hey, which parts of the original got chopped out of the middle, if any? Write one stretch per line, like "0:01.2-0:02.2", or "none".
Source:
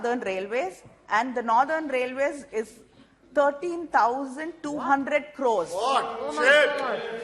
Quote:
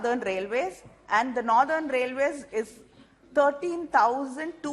none